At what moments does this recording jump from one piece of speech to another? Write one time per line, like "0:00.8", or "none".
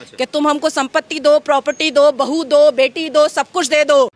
none

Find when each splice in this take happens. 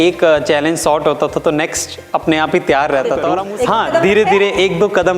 0:03.4

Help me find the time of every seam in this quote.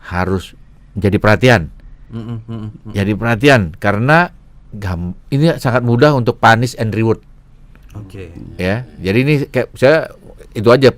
none

